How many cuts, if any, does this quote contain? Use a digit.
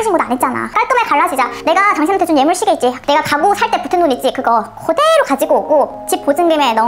2